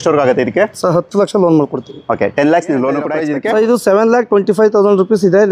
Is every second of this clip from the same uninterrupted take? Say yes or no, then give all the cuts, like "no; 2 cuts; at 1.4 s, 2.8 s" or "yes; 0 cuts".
no; 1 cut; at 3.2 s